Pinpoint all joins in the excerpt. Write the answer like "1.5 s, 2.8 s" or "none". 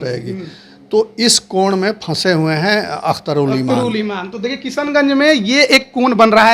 none